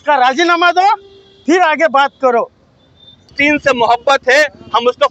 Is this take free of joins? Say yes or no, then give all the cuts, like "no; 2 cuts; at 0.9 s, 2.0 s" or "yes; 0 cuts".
no; 1 cut; at 3.3 s